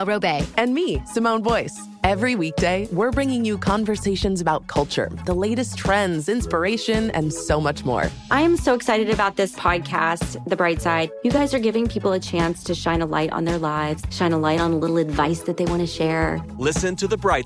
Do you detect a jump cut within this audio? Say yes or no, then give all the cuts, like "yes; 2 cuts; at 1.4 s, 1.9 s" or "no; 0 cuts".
no; 0 cuts